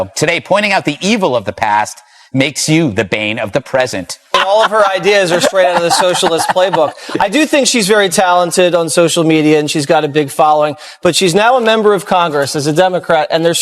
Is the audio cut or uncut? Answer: cut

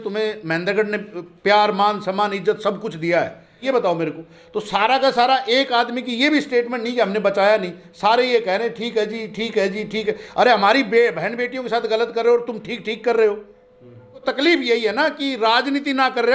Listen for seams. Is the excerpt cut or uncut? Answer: cut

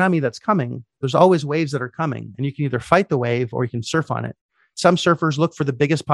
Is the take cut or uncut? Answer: uncut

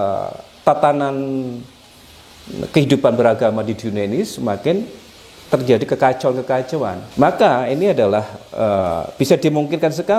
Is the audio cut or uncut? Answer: cut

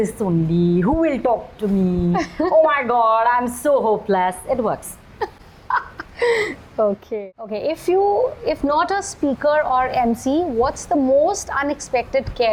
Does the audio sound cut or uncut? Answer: uncut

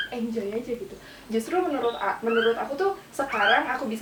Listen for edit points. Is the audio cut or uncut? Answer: uncut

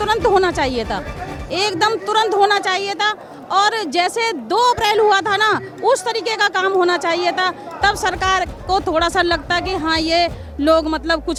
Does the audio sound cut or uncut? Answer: uncut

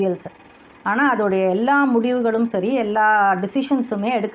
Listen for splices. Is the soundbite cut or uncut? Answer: uncut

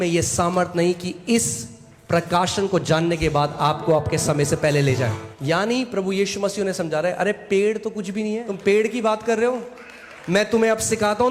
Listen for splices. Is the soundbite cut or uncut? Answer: cut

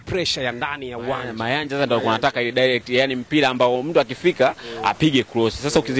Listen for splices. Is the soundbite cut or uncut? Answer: cut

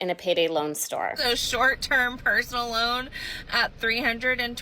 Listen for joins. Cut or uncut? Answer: cut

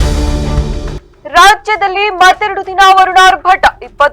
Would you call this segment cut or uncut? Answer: cut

